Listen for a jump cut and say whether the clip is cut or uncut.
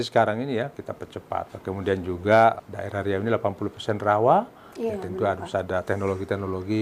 cut